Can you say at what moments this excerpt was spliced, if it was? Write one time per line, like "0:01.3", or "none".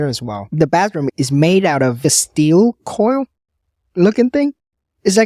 0:01.0
0:02.0